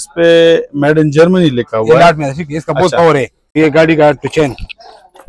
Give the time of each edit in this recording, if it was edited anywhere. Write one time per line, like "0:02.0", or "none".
0:03.6